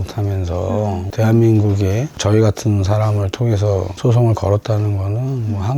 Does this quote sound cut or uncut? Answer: cut